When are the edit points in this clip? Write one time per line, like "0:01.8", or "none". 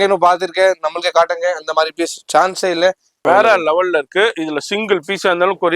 0:03.1